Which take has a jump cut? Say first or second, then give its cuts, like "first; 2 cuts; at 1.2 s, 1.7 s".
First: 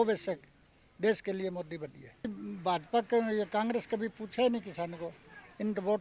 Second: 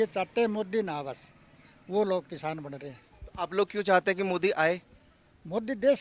first; 1 cut; at 2.3 s